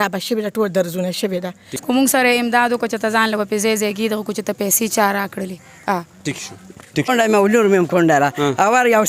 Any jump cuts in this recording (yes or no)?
yes